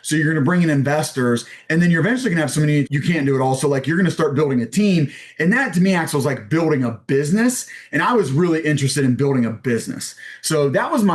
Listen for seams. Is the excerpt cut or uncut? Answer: uncut